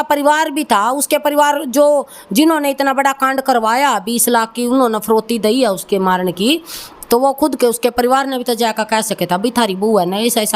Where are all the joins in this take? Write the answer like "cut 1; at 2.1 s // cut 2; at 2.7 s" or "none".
none